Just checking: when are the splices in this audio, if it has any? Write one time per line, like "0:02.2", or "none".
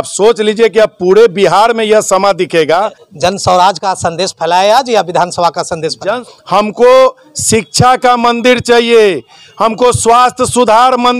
0:03.0
0:06.2